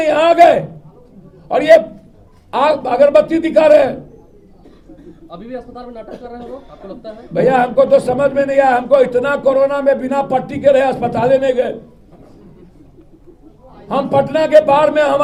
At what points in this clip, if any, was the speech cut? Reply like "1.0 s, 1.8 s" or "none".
none